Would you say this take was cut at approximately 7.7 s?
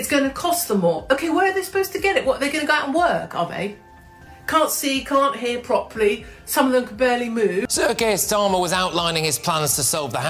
yes; 1 cut; at 7.7 s

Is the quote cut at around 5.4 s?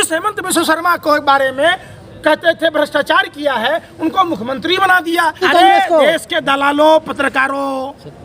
yes; 1 cut; at 5.4 s

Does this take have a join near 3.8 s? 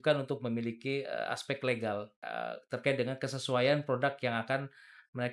no; 1 cut; at 2.2 s

